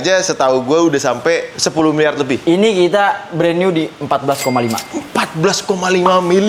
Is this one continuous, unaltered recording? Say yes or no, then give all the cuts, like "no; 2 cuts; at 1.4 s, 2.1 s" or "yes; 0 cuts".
yes; 0 cuts